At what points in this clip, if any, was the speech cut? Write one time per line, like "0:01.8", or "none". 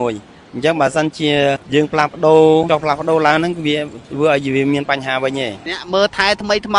0:01.6
0:02.7
0:05.7